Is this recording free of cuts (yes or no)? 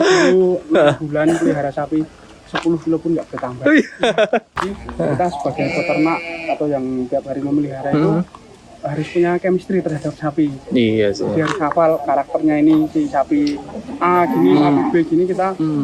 no